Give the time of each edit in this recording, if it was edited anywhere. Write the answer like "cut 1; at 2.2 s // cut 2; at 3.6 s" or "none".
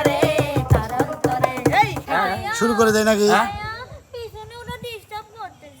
cut 1; at 2.0 s